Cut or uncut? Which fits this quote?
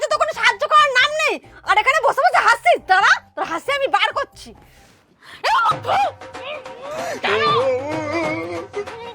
uncut